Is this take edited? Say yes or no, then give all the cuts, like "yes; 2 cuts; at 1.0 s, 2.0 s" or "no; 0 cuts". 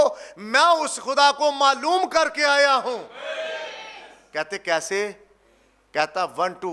no; 0 cuts